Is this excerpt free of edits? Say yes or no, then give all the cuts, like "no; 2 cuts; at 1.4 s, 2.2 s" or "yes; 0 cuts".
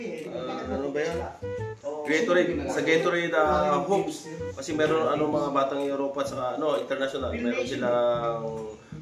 no; 1 cut; at 1.8 s